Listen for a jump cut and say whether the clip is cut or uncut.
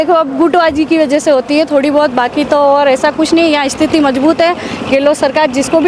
uncut